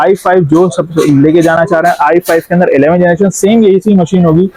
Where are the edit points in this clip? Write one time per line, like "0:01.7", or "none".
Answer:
none